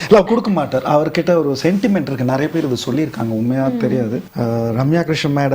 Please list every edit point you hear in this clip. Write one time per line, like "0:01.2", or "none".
0:04.3